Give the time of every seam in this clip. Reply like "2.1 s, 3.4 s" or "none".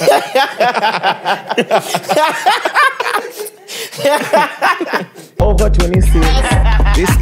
5.2 s